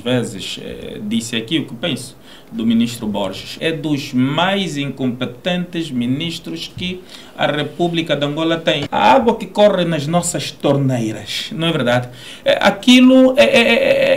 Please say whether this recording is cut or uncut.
cut